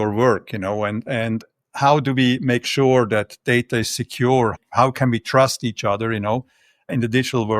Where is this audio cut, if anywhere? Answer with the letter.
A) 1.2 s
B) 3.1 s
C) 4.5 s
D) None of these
C